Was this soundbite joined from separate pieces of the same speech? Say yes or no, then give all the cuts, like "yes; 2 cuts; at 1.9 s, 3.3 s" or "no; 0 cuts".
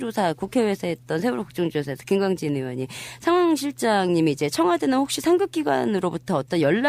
no; 0 cuts